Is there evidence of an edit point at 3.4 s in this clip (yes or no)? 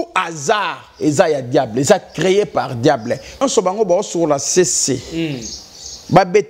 yes